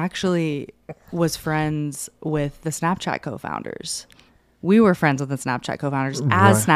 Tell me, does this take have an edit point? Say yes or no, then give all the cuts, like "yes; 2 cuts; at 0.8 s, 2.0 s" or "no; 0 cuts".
no; 0 cuts